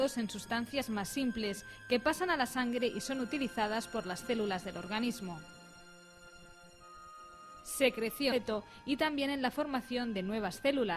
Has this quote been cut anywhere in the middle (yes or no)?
no